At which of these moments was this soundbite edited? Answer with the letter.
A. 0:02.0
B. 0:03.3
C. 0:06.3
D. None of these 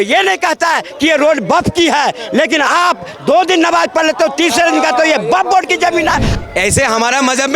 C